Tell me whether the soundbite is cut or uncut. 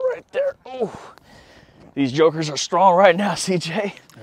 uncut